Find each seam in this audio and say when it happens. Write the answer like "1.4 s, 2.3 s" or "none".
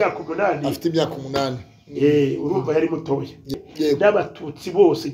3.5 s